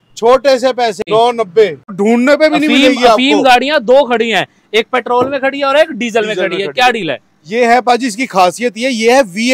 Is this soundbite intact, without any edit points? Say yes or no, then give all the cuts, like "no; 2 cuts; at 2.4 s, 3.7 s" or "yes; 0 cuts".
no; 2 cuts; at 1.0 s, 1.9 s